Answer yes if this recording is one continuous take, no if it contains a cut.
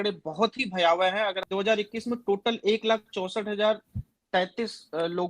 no